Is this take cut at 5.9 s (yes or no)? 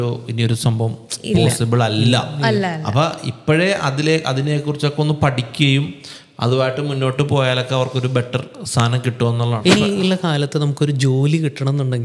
no